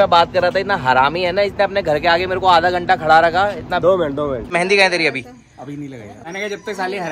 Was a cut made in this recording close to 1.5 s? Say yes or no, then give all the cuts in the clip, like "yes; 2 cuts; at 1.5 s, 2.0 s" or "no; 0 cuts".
no; 2 cuts; at 4.5 s, 6.1 s